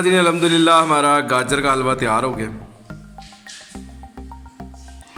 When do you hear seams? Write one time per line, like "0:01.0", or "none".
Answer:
none